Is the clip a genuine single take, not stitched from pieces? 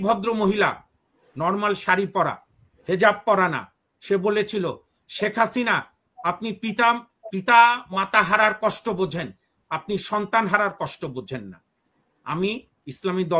yes; 0 cuts

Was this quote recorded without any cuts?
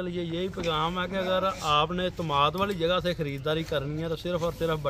yes; 0 cuts

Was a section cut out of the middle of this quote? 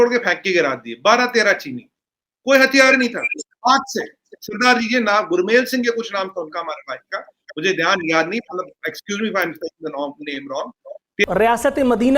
yes; 1 cut; at 11.2 s

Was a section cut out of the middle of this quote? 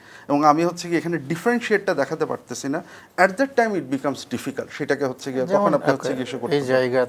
no; 0 cuts

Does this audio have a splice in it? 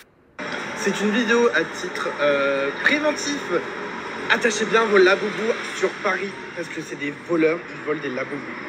no; 0 cuts

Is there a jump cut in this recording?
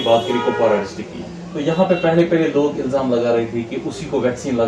no; 0 cuts

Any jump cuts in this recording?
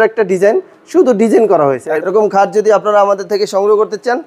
yes; 1 cut; at 1.9 s

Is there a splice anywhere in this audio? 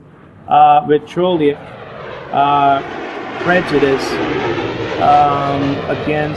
yes; 1 cut; at 2.9 s

